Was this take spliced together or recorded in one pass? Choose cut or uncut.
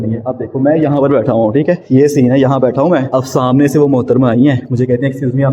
cut